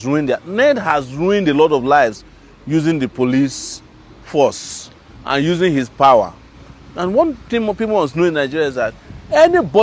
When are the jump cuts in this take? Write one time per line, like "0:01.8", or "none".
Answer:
none